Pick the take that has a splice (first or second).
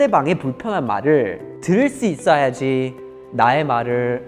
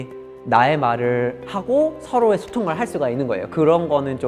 first